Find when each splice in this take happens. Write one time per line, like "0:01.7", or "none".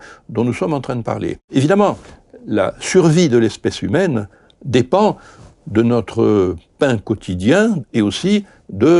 0:01.4
0:07.8